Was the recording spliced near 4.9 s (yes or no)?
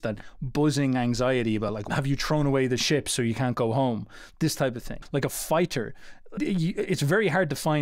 yes